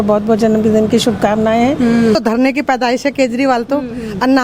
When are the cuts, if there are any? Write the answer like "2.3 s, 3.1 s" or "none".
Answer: 2.1 s